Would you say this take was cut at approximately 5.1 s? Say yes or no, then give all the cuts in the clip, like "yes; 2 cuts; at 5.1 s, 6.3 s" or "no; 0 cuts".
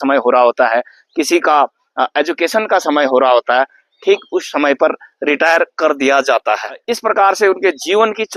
no; 1 cut; at 6.8 s